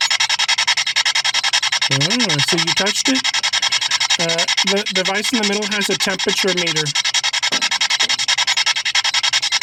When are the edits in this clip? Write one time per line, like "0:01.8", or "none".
none

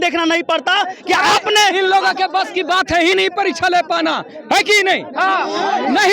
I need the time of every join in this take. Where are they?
none

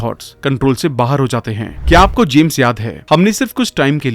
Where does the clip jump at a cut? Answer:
0:01.7

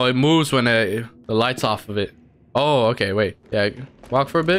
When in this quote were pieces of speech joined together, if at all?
0:01.1
0:03.4

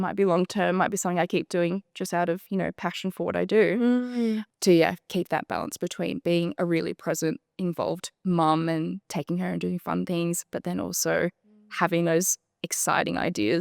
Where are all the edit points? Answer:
0:04.4

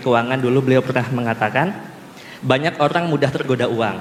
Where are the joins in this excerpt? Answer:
none

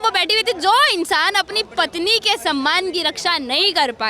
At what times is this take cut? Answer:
none

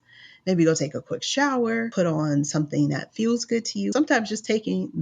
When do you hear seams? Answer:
0:01.9
0:03.9

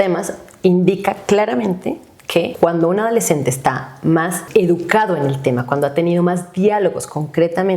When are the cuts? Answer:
0:02.5
0:04.4

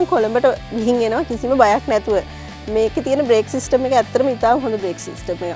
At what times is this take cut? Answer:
none

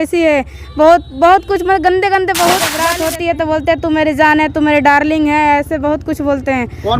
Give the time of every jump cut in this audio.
0:02.8

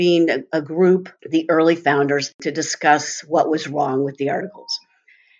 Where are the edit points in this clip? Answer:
0:01.2
0:02.3

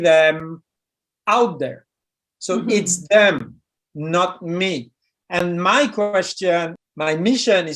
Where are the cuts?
0:06.8

